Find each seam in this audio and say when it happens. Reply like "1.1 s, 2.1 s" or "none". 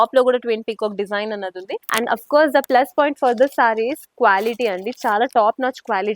1.8 s